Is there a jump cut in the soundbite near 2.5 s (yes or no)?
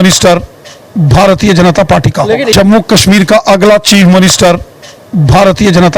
yes